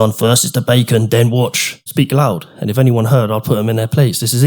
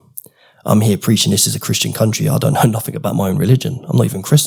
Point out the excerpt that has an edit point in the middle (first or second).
first